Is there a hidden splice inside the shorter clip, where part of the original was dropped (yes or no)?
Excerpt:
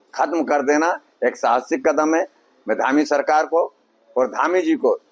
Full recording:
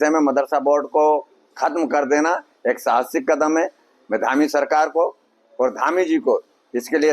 no